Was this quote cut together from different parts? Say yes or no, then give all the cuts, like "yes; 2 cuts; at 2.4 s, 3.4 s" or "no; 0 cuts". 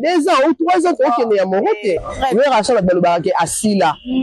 yes; 1 cut; at 2.0 s